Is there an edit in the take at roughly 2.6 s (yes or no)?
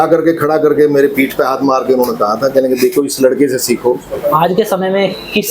no